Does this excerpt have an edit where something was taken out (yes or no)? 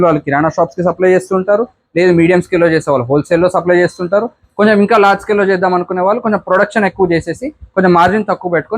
no